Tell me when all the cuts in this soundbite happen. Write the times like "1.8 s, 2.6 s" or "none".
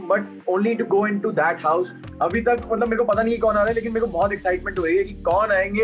2.0 s